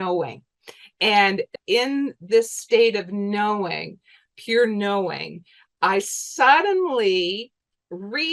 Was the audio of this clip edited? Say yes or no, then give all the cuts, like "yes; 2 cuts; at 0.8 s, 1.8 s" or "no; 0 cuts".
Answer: yes; 1 cut; at 1.6 s